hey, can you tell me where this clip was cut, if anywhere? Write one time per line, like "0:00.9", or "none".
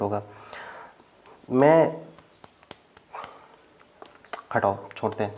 none